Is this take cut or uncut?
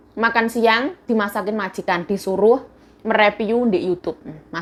uncut